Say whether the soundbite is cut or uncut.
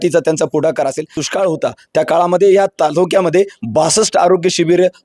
cut